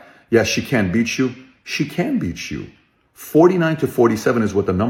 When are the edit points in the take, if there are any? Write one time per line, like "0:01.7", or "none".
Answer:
none